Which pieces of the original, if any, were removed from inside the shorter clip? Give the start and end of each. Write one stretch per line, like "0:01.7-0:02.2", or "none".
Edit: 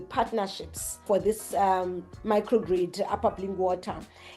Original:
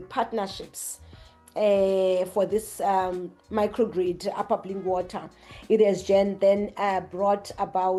0:01.0-0:02.3